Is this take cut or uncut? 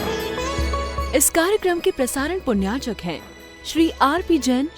cut